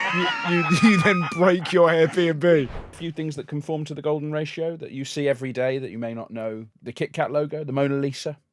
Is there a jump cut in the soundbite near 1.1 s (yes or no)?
no